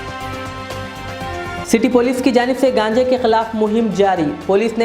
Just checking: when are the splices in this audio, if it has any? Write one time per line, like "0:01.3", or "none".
0:01.6